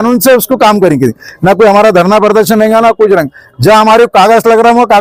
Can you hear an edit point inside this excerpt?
no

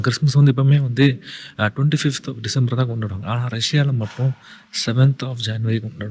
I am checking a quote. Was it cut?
no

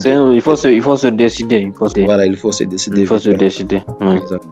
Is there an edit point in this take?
no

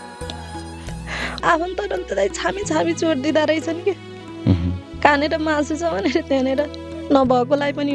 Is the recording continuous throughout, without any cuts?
no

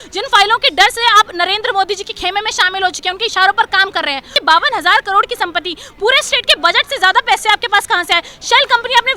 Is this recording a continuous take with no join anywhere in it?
no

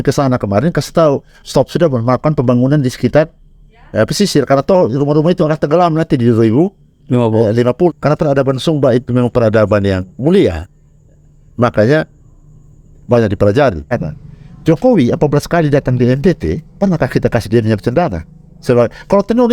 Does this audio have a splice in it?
yes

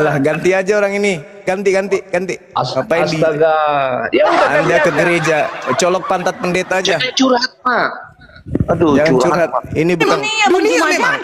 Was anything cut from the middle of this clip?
yes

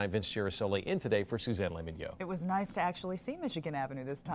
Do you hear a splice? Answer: no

